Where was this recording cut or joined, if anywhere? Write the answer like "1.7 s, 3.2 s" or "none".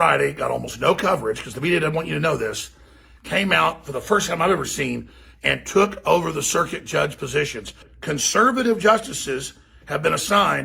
7.9 s